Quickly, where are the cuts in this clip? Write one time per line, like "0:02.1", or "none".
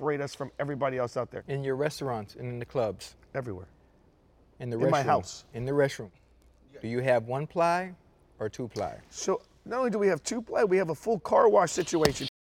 0:01.4